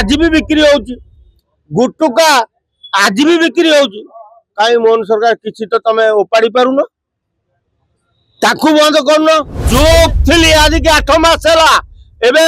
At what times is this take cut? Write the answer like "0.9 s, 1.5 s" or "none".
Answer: 9.6 s